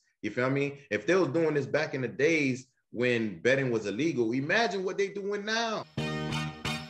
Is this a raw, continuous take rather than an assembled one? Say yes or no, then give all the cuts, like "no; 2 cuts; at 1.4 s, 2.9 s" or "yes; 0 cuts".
no; 1 cut; at 5.9 s